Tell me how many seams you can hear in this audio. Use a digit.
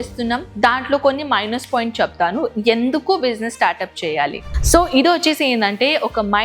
1